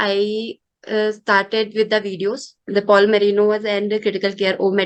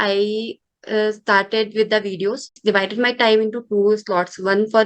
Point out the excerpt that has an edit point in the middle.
second; 1 cut; at 2.5 s

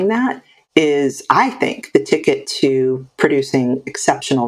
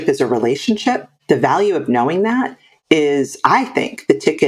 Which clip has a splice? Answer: second; 1 cut; at 1.1 s

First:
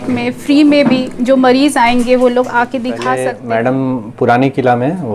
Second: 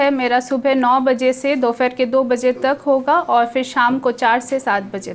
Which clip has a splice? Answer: first; 1 cut; at 3.3 s

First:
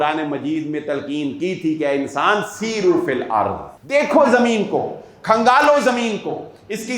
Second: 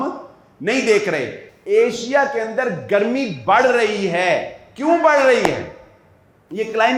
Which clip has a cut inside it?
first; 1 cut; at 3.7 s

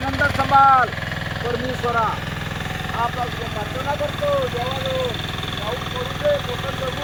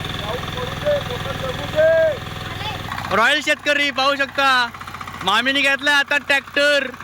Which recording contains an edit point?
second; 1 cut; at 2.8 s

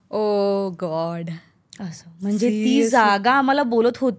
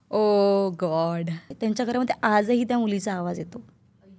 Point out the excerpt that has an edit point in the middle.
second; 1 cut; at 1.5 s

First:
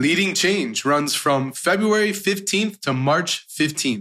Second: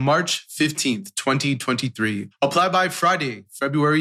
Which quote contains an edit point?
second; 1 cut; at 2.3 s

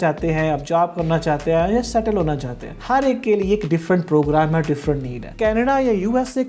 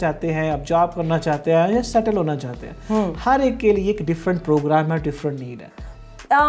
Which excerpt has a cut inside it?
first; 2 cuts; at 2.8 s, 5.3 s

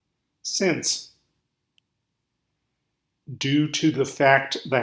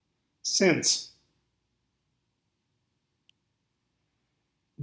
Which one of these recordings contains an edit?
first; 1 cut; at 1.4 s

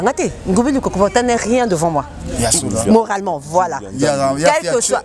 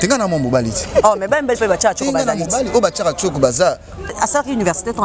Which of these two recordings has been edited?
second; 1 cut; at 4.1 s

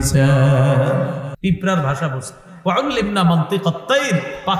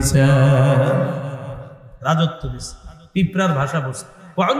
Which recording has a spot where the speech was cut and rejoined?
first; 1 cut; at 1.3 s

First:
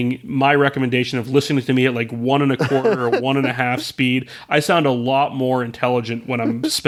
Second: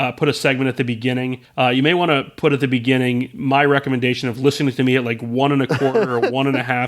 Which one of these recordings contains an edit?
second; 1 cut; at 1.4 s

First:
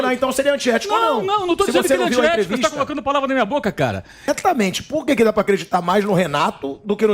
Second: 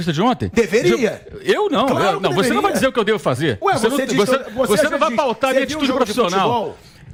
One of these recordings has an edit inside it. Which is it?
first; 1 cut; at 4.3 s

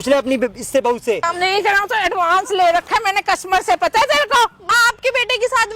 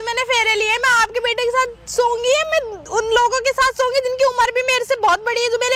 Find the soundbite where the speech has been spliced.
first; 2 cuts; at 1.2 s, 4.7 s

